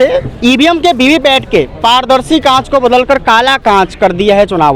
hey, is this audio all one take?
yes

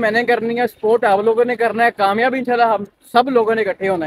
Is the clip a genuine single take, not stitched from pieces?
yes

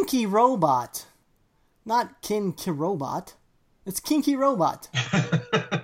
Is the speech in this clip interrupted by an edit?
yes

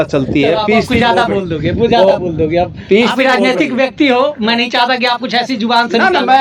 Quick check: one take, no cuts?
yes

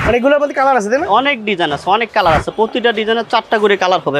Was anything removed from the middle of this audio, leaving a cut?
no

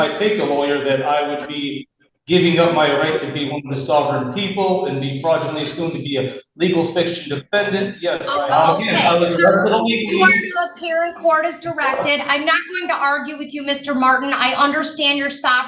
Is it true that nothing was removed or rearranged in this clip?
no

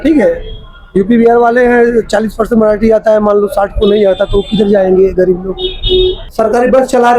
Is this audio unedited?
no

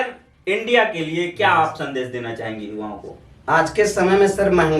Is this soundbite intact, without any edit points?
yes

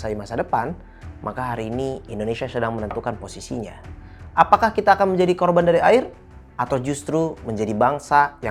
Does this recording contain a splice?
no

